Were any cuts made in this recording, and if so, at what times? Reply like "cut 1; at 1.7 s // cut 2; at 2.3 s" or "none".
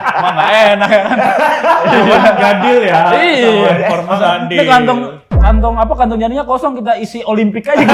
none